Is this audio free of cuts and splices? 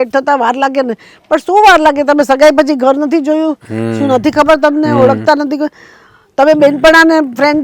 yes; 0 cuts

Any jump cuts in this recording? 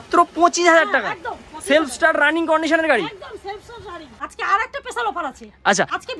yes; 1 cut; at 4.1 s

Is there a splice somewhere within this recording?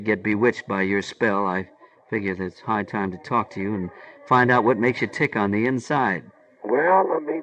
no; 0 cuts

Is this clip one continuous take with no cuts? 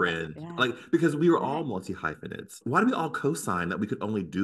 no; 1 cut; at 2.5 s

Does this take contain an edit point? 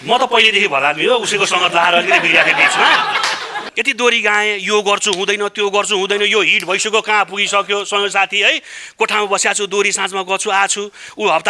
no; 0 cuts

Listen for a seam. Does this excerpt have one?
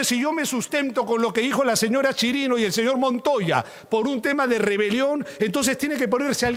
no; 0 cuts

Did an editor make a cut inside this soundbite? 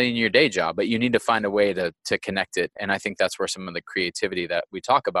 yes; 1 cut; at 2.8 s

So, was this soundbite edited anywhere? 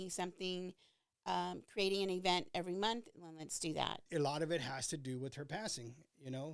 yes; 1 cut; at 4.0 s

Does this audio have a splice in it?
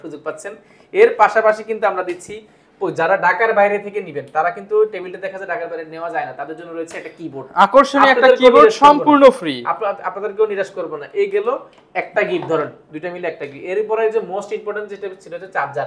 no; 0 cuts

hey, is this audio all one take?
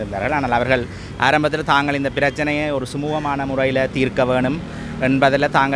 yes; 0 cuts

